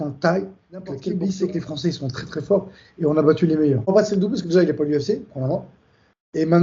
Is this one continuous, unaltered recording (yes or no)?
no